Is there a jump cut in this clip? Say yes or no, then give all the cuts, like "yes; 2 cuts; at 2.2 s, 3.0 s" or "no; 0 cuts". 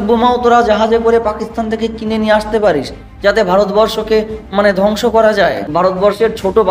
yes; 1 cut; at 5.6 s